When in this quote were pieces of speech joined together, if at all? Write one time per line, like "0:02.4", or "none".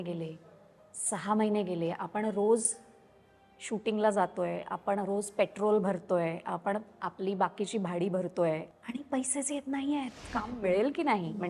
0:08.7
0:10.6